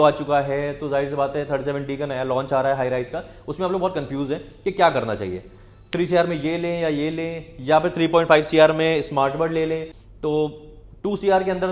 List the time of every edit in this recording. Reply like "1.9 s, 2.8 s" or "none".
9.9 s